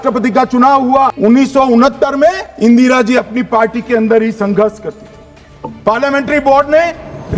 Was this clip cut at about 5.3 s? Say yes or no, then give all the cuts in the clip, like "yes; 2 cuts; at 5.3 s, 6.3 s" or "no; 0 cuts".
no; 2 cuts; at 1.1 s, 2.5 s